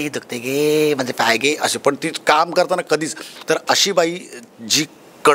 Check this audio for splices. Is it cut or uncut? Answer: uncut